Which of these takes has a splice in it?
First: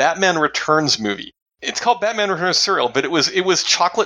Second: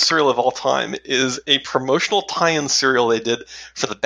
first; 1 cut; at 1.5 s

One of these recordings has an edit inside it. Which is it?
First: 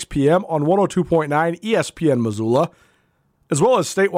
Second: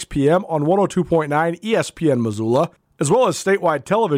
second; 1 cut; at 2.9 s

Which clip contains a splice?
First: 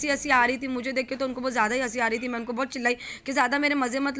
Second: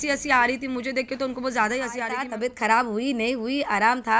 second; 1 cut; at 2.2 s

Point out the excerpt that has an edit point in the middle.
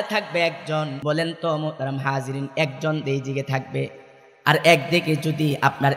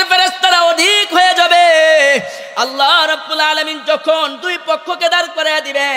first; 1 cut; at 1.0 s

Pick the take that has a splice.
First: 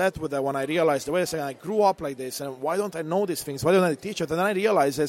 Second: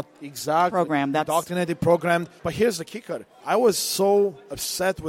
second; 2 cuts; at 2.3 s, 3.3 s

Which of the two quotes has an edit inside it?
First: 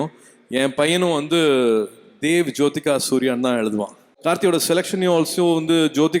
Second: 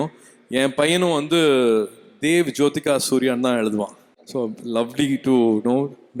first; 1 cut; at 4.1 s

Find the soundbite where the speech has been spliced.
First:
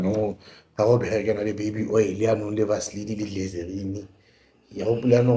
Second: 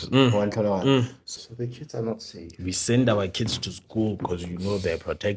second; 1 cut; at 1.2 s

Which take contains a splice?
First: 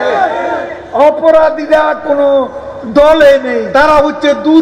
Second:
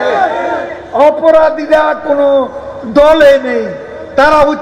first; 1 cut; at 3.6 s

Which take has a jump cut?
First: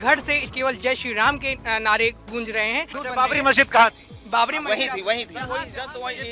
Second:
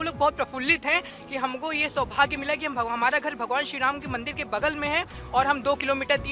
first; 1 cut; at 3.0 s

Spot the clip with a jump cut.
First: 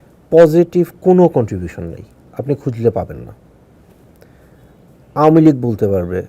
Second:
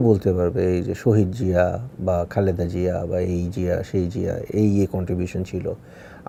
first; 1 cut; at 4.4 s

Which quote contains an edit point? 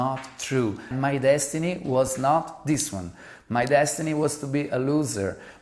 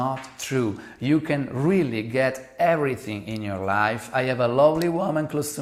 first; 1 cut; at 0.9 s

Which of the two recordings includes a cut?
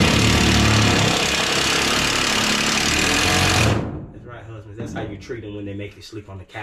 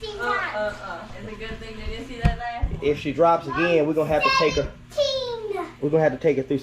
second; 1 cut; at 1.1 s

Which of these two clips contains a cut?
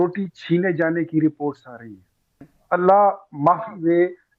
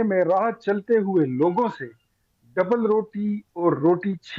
first; 1 cut; at 2.5 s

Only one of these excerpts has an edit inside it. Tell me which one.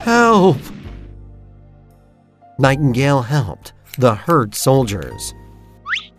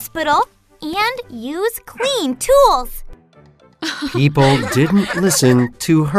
first; 2 cuts; at 0.9 s, 2.6 s

